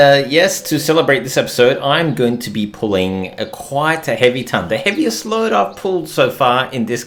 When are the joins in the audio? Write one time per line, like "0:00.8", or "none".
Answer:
none